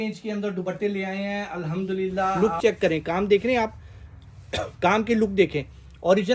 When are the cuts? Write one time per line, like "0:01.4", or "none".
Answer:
0:02.3